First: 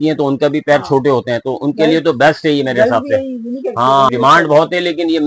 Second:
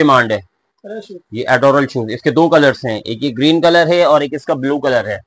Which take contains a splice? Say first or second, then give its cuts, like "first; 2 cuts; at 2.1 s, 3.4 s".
first; 1 cut; at 4.1 s